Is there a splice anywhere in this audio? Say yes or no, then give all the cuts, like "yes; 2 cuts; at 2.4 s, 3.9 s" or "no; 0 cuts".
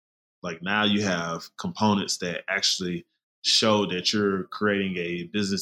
no; 0 cuts